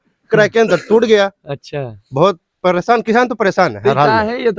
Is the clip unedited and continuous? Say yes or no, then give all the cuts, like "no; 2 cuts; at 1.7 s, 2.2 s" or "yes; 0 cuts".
yes; 0 cuts